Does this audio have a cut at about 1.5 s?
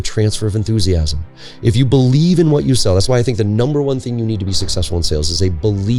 no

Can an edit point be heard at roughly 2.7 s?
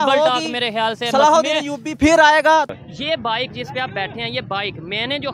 yes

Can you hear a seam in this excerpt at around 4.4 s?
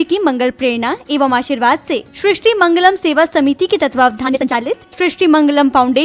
yes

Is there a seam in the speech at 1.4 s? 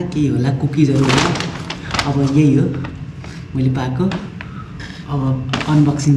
no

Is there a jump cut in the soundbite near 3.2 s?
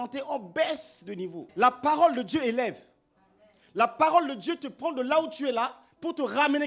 no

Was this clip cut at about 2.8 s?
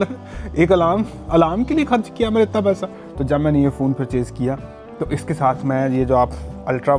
yes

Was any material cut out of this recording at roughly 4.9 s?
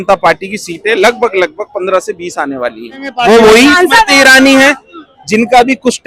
no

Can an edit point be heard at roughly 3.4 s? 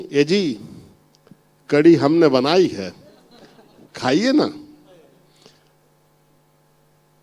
no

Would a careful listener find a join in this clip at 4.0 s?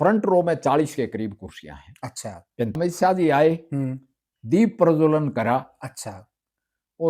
no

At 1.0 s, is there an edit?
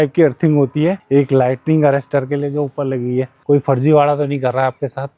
no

